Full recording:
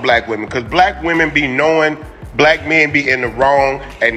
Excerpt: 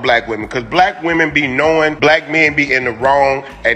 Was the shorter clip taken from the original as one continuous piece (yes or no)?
no